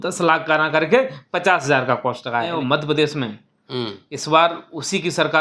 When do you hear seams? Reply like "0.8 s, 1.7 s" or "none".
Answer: 2.5 s

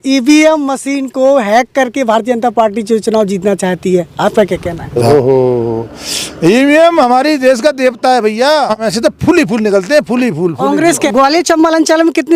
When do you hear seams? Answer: 5.0 s, 8.8 s, 11.1 s

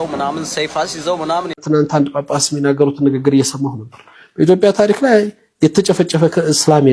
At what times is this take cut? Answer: 1.5 s

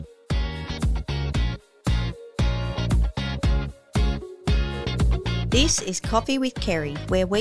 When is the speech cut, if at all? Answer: none

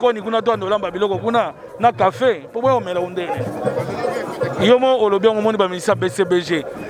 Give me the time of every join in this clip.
none

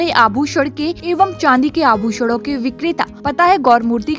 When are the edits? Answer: 1.0 s, 3.1 s

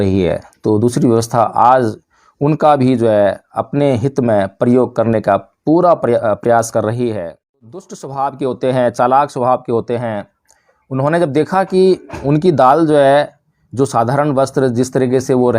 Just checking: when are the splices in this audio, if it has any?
7.9 s

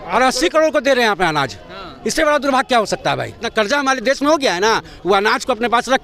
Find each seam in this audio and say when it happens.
3.5 s

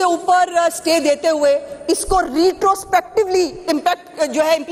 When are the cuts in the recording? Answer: none

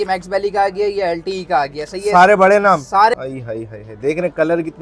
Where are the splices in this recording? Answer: 3.1 s

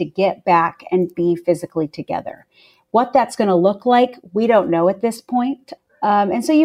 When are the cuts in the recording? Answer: 5.7 s

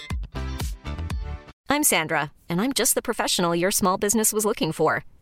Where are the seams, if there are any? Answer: 1.5 s

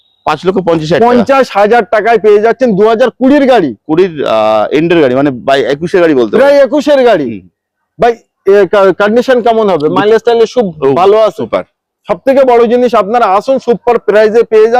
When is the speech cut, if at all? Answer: none

